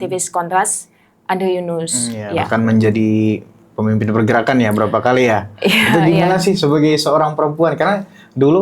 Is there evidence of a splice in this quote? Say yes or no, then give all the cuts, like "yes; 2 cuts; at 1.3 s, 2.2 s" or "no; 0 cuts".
yes; 1 cut; at 2.5 s